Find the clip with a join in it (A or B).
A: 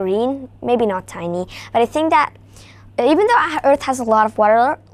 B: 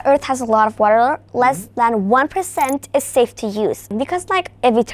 B